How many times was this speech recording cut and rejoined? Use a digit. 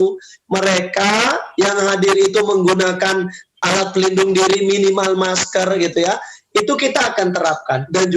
1